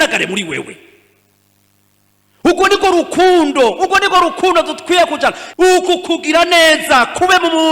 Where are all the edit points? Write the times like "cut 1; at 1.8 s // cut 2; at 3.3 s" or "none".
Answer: cut 1; at 5.4 s